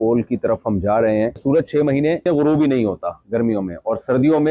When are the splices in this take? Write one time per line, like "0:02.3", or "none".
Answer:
0:01.4
0:02.2